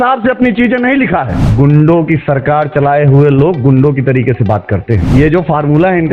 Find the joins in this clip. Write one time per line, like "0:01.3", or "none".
0:01.5
0:05.0